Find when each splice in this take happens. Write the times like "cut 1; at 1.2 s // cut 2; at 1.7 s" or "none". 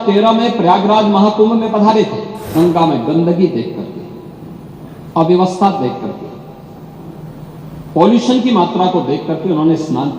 cut 1; at 2.5 s